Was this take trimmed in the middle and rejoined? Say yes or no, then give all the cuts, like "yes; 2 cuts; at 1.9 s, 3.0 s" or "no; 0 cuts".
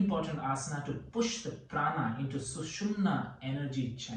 no; 0 cuts